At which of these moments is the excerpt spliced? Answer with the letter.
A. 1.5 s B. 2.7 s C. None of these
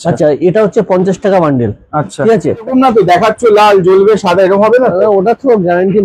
B